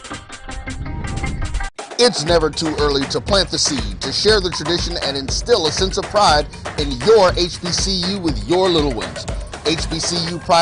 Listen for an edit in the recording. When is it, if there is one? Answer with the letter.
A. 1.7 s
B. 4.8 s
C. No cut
A